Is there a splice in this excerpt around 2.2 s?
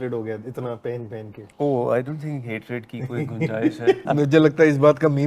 no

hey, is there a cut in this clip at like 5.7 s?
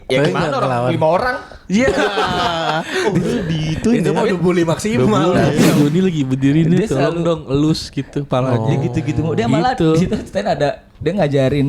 yes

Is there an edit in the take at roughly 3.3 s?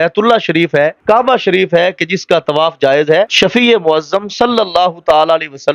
yes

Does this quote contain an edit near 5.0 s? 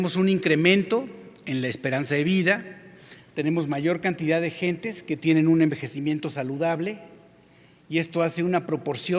no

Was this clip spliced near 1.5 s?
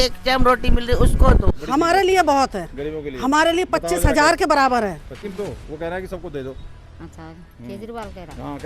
yes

